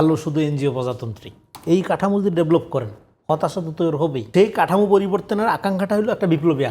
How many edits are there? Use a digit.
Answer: 1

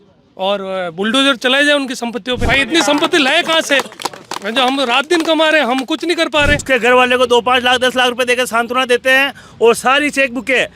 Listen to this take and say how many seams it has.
2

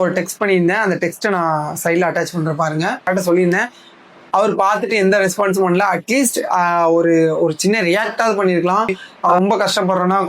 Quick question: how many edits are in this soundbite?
2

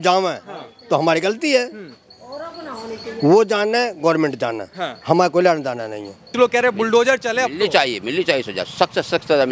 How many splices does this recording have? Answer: 1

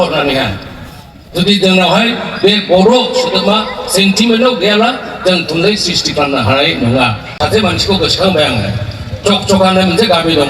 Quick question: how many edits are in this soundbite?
1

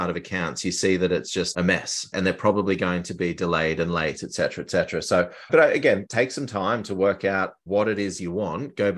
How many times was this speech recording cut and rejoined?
3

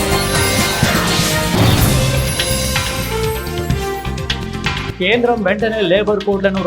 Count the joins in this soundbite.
1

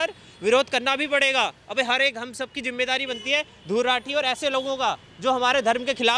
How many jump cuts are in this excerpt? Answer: 0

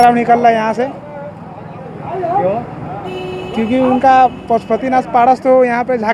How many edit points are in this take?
0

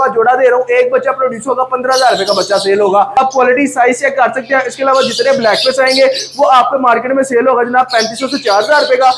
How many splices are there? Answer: 0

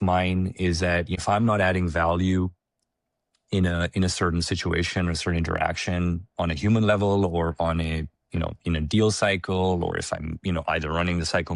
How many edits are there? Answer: 1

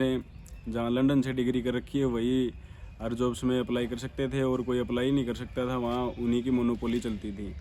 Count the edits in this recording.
0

